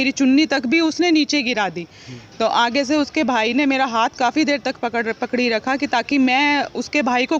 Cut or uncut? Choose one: uncut